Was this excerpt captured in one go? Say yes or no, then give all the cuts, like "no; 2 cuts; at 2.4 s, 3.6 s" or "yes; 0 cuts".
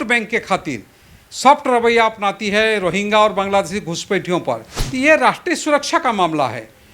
no; 1 cut; at 4.7 s